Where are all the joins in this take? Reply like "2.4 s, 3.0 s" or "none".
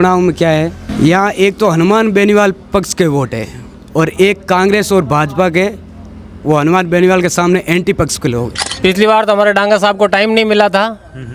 8.6 s